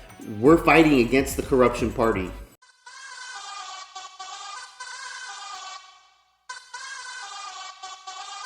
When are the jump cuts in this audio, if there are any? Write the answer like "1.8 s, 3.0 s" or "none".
2.7 s

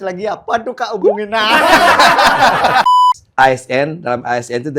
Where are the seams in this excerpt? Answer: 2.8 s

